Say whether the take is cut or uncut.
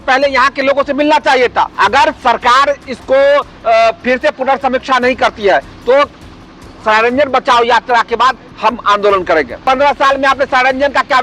cut